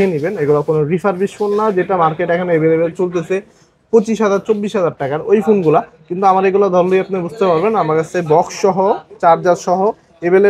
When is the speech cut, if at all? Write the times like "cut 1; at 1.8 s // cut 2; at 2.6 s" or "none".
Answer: none